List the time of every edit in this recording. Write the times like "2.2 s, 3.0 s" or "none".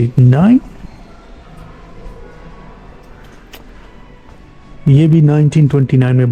none